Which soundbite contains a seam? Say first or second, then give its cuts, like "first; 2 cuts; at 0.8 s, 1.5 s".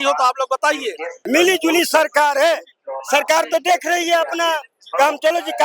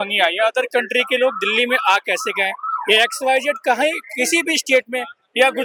first; 1 cut; at 1.2 s